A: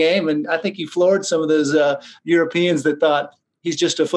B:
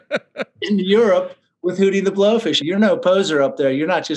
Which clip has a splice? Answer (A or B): B